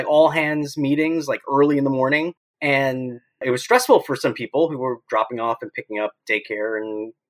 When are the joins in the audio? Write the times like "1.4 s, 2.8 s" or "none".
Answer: 2.5 s, 3.4 s